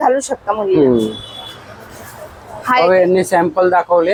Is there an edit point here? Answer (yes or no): no